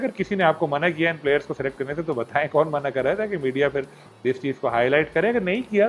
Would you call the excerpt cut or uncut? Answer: uncut